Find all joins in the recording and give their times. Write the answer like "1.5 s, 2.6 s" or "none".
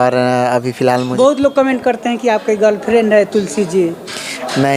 1.1 s